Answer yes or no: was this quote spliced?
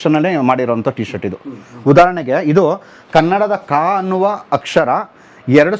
no